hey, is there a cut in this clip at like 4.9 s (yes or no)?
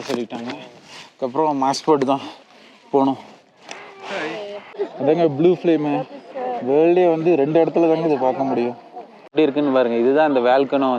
yes